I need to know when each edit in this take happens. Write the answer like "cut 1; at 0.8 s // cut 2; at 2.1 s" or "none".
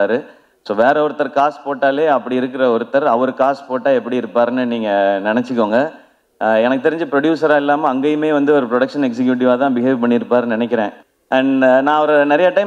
cut 1; at 11.0 s